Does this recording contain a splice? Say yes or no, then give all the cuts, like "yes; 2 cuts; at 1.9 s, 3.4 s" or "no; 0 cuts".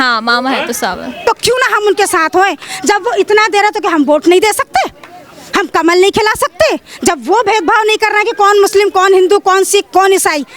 yes; 1 cut; at 1.2 s